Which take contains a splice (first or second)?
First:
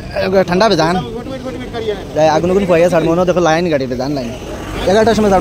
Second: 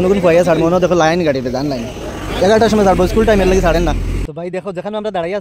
second